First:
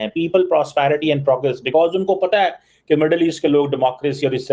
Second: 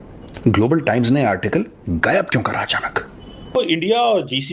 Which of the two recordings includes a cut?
second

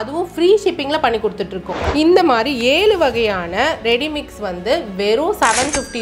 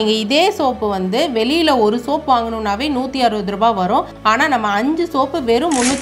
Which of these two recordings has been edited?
first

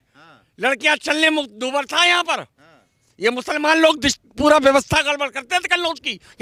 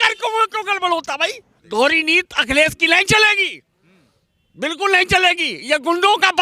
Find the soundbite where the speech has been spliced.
second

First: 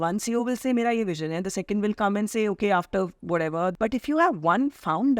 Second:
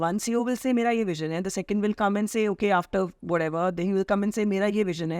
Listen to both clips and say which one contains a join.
first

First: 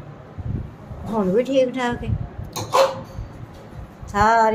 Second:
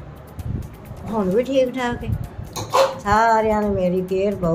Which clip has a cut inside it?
second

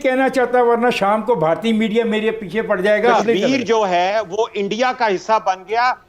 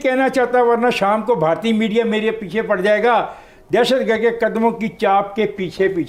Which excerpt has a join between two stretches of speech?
first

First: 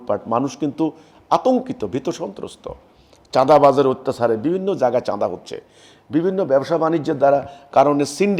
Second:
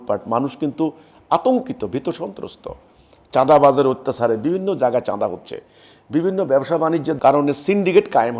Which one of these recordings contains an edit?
second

